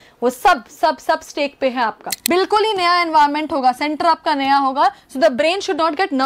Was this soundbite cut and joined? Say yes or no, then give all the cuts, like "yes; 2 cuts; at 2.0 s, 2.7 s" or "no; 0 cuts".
yes; 1 cut; at 2.1 s